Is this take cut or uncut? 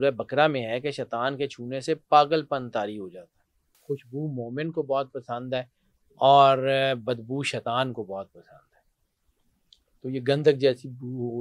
cut